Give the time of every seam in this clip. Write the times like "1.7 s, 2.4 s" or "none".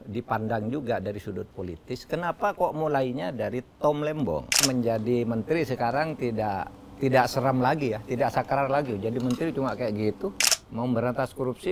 4.7 s, 10.4 s